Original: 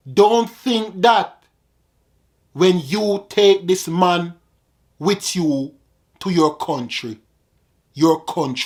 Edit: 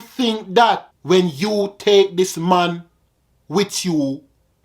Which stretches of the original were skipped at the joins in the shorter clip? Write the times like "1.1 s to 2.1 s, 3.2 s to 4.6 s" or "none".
1.4 s to 2.4 s